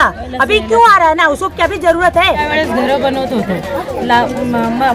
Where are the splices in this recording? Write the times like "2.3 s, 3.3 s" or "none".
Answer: 2.4 s